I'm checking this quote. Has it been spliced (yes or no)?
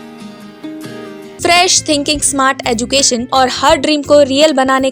yes